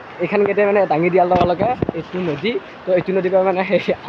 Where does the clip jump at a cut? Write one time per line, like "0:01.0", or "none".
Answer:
none